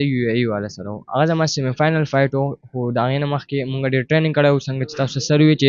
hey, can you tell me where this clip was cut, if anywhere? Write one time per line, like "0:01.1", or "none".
none